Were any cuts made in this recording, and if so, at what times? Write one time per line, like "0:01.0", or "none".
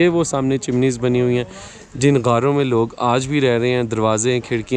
none